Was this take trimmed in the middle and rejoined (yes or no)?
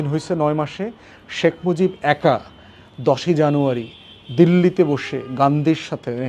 no